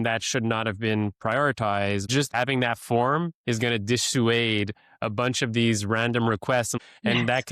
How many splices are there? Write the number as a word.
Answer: two